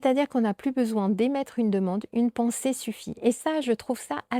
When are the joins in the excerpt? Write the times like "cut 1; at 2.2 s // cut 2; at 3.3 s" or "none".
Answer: none